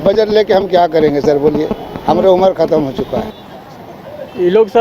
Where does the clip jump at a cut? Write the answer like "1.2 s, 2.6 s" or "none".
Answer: 3.3 s